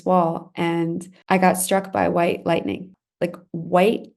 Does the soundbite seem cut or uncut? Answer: cut